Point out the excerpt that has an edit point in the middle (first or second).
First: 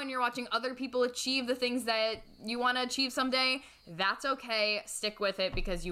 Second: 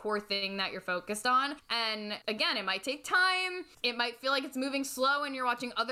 second